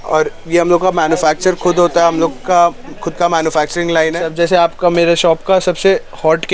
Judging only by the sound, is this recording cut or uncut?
cut